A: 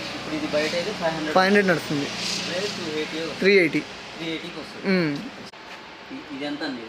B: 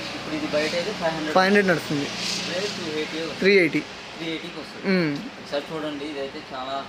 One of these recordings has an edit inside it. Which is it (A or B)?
A